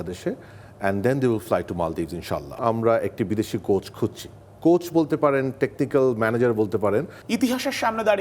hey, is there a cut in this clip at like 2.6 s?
yes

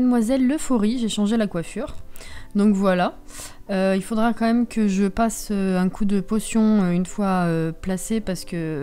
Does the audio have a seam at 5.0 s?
no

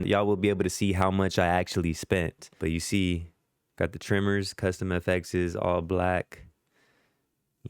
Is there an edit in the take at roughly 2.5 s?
no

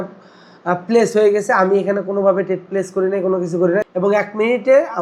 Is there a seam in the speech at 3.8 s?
yes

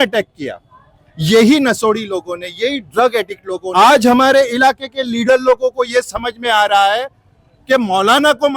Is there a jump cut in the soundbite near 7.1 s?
no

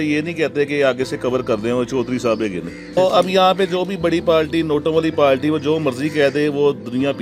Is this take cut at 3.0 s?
yes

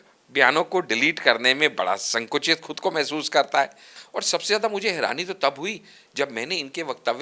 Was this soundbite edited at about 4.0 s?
yes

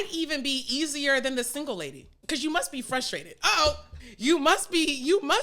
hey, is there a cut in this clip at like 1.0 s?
no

